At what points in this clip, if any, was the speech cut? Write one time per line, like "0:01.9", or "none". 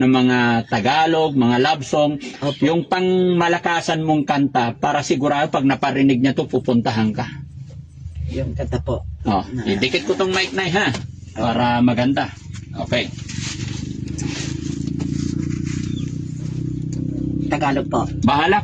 none